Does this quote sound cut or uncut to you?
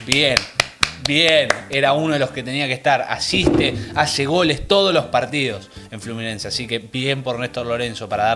uncut